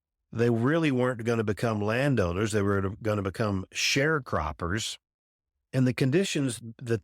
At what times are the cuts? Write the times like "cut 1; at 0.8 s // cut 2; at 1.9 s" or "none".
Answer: cut 1; at 5.7 s